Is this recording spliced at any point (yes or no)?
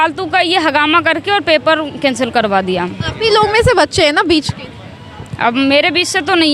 no